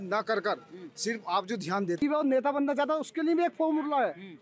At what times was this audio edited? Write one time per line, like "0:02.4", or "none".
0:02.0